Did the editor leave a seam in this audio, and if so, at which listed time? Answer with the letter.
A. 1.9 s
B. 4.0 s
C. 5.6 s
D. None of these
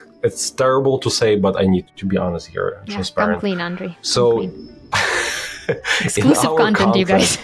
A